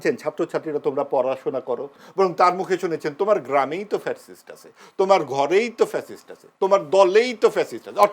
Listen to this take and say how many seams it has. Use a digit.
1